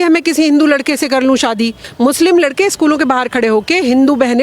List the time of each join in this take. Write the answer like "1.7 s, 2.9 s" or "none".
1.8 s